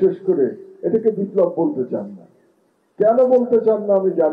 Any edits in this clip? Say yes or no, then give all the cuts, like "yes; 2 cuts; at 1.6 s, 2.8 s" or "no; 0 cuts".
no; 0 cuts